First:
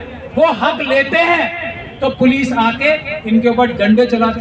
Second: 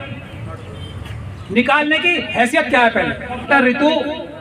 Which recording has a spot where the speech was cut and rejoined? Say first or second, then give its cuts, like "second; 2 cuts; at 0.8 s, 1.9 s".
second; 1 cut; at 3.4 s